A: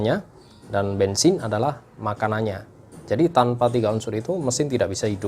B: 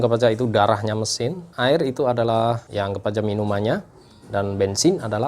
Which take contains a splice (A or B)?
B